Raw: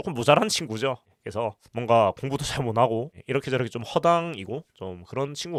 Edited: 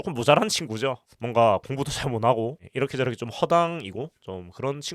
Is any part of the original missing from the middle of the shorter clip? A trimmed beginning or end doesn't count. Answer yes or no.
yes